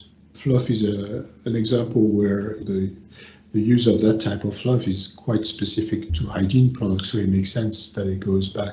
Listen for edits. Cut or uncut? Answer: cut